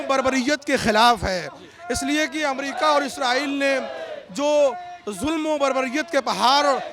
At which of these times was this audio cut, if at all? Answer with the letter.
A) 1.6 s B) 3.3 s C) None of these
C